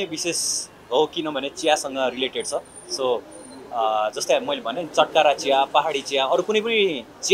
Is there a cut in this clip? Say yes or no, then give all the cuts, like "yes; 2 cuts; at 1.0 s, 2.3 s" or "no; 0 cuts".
no; 0 cuts